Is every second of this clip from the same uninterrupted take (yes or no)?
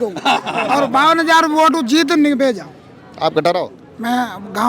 yes